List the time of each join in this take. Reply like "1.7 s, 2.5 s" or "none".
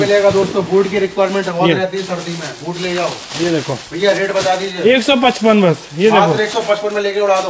none